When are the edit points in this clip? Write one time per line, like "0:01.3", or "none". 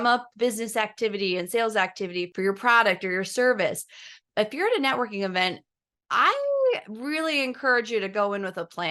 0:02.3
0:04.2